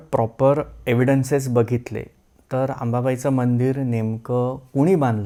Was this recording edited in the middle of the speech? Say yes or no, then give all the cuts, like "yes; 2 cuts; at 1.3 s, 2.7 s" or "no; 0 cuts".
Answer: no; 0 cuts